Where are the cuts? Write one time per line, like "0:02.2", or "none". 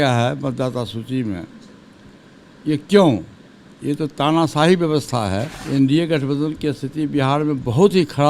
0:05.6